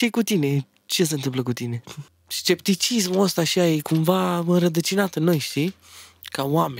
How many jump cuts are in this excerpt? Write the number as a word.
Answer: one